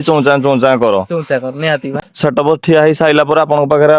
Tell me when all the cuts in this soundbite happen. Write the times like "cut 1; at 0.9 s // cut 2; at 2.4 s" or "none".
cut 1; at 2.0 s